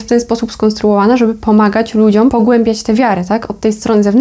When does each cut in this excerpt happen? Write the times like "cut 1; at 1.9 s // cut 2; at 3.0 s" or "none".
cut 1; at 2.3 s